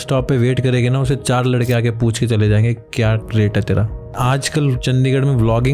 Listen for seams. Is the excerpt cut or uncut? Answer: cut